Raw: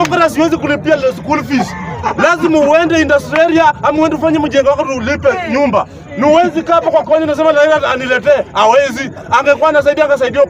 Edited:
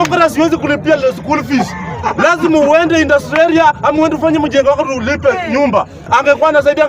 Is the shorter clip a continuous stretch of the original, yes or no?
no